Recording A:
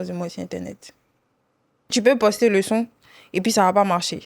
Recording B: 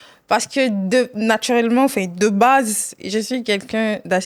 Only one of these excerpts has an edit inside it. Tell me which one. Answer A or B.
A